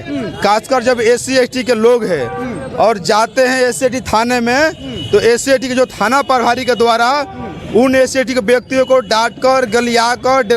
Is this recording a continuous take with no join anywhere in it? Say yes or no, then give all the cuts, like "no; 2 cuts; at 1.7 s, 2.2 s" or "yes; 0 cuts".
yes; 0 cuts